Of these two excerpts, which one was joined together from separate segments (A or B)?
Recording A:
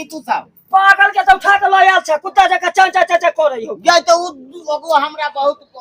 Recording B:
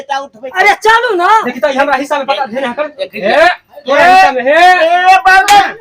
B